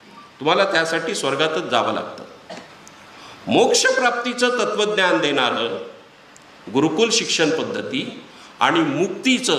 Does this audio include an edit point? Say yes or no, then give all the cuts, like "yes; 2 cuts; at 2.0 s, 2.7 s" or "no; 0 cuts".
no; 0 cuts